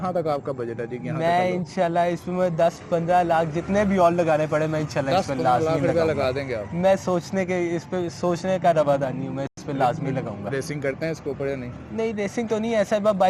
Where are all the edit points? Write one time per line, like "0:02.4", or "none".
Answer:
none